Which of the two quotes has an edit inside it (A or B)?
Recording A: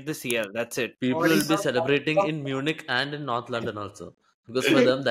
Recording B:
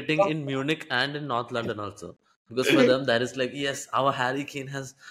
A